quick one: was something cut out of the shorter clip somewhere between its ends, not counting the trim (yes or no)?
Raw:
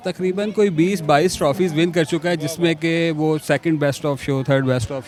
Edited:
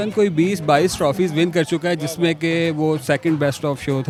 no